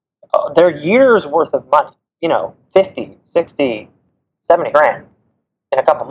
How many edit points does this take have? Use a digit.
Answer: 2